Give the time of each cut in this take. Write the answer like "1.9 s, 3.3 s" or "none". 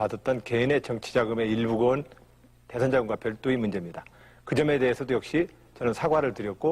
4.7 s

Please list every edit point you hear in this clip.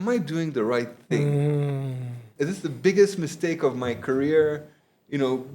2.2 s

